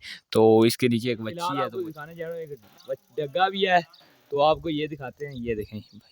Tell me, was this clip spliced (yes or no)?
yes